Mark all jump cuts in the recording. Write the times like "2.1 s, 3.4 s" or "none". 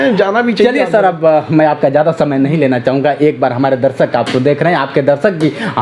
none